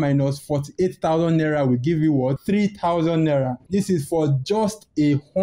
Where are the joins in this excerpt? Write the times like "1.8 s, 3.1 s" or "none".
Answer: none